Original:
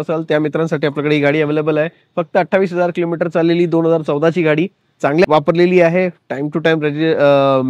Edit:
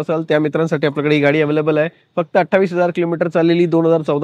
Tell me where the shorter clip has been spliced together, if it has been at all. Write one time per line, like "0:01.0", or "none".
none